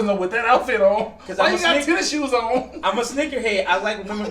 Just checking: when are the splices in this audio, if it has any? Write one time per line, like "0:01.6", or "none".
none